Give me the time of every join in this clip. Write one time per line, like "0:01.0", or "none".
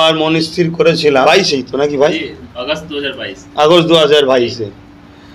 0:01.2